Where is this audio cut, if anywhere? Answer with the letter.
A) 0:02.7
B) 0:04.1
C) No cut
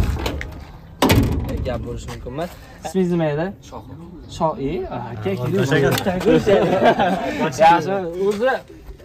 A